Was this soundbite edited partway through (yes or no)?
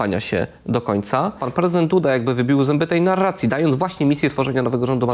yes